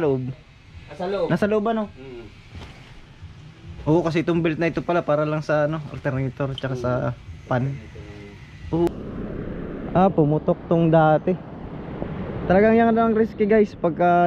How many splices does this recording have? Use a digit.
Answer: 1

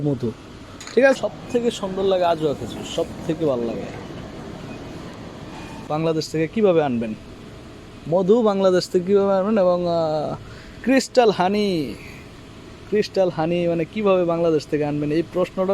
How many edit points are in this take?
2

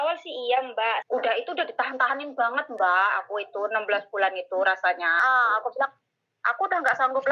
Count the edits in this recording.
2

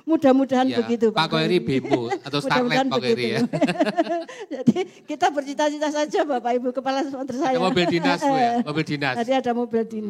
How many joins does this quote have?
0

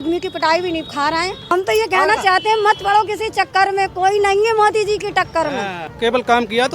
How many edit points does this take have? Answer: 2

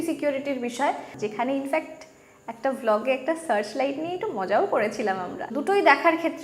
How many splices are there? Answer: 2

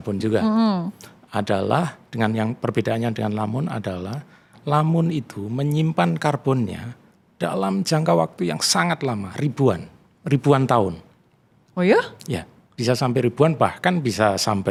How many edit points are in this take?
0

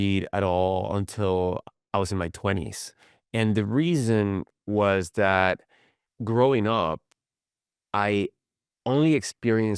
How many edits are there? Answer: 0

